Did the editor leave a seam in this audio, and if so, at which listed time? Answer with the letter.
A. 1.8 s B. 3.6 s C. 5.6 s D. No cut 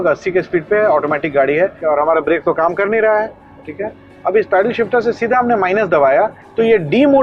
A